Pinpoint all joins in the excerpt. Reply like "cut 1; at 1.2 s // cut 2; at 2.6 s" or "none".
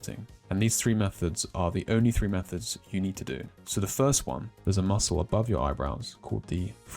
cut 1; at 4.5 s